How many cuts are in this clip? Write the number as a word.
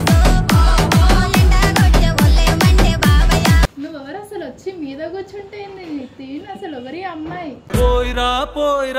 one